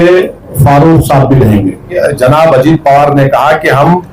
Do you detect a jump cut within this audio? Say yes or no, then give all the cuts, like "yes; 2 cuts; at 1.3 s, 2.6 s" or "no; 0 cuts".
yes; 1 cut; at 1.9 s